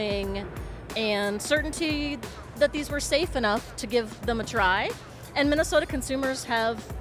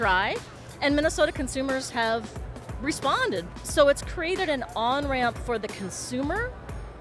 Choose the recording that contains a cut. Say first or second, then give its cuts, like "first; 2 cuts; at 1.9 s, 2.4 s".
second; 1 cut; at 3.5 s